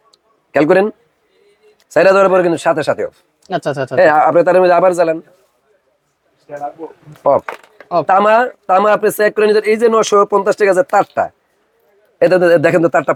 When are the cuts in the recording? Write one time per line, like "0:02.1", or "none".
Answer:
none